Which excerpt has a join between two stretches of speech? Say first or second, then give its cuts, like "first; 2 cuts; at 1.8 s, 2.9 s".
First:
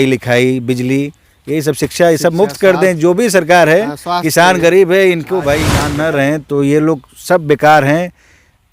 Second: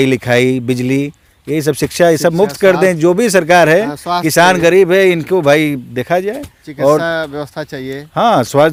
first; 1 cut; at 5.8 s